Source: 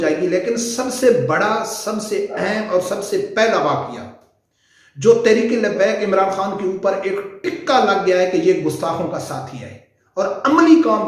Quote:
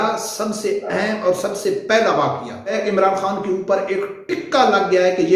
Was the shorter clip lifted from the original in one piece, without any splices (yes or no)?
no